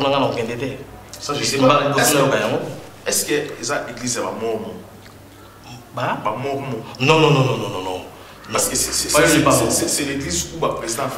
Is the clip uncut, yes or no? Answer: yes